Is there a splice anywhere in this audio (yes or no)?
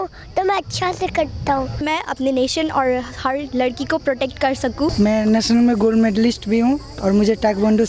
yes